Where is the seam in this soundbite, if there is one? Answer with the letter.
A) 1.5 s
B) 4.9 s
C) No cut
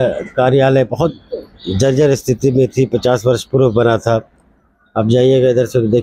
C